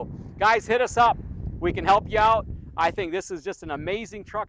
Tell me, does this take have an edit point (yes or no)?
no